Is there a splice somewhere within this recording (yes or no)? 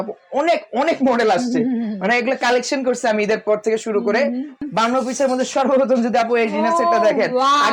yes